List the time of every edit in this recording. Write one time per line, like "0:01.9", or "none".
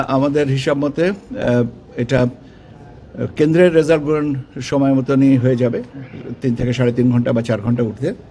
none